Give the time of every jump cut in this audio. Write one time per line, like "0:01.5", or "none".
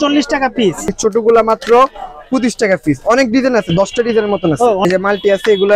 0:00.9
0:04.8